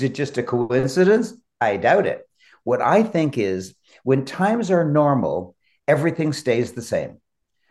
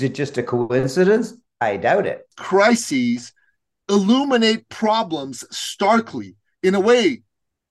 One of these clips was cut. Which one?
second; 1 cut; at 2.4 s

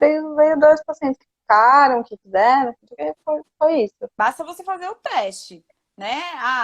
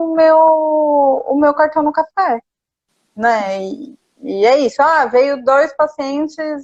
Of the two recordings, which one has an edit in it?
first; 1 cut; at 4.1 s

